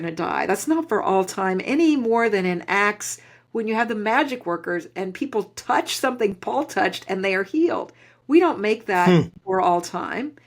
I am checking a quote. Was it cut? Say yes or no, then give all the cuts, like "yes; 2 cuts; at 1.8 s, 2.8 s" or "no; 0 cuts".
no; 0 cuts